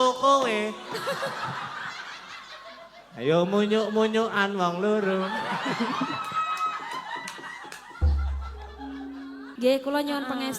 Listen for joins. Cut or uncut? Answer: cut